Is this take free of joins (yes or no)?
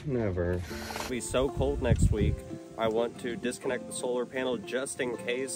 no